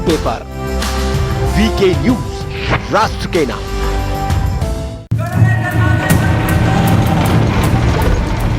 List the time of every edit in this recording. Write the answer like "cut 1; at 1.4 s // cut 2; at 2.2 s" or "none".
cut 1; at 5.0 s